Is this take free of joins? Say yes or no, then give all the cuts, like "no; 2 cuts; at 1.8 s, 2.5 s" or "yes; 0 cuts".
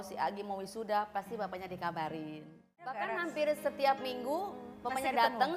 no; 1 cut; at 2.8 s